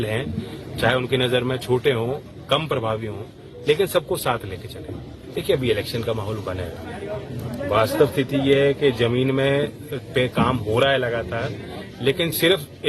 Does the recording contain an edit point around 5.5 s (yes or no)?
yes